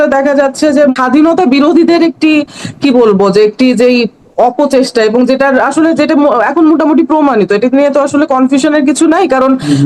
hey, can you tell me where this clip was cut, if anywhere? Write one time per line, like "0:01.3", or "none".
0:00.9